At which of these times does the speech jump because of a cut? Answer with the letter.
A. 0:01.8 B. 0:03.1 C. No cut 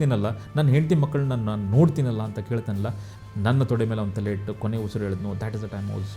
B